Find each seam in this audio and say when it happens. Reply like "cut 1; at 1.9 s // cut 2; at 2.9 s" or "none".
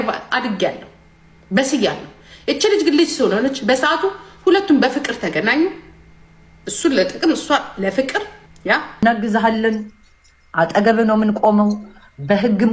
cut 1; at 8.9 s